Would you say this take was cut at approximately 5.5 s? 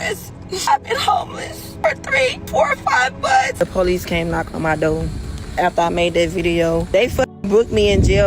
no; 5 cuts; at 0.7 s, 1.7 s, 2.4 s, 3.5 s, 6.8 s

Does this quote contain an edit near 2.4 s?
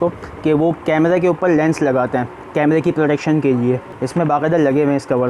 no; 1 cut; at 3.9 s

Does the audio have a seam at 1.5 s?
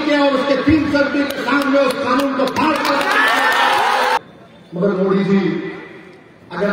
no; 1 cut; at 4.2 s

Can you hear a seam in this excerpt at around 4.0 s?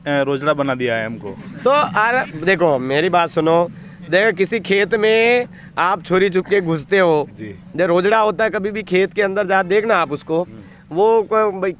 no; 0 cuts

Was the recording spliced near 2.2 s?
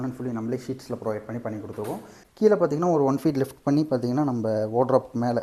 yes; 1 cut; at 2.2 s

